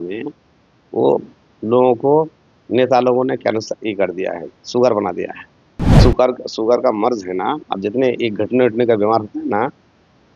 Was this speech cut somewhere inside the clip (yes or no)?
yes